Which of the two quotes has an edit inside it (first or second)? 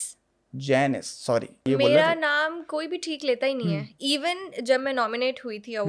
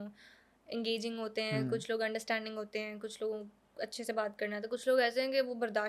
first